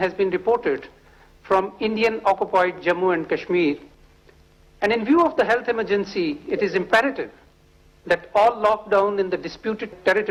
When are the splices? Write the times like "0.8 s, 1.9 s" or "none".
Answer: none